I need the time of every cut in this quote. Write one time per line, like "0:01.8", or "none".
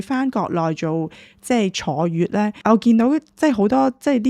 0:02.6